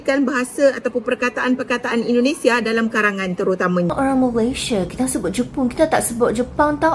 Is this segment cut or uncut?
cut